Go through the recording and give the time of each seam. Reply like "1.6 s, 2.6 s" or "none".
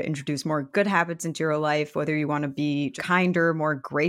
3.0 s